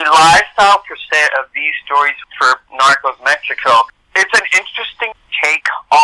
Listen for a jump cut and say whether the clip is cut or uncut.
cut